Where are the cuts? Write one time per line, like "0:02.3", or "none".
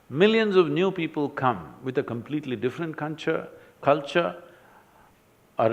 none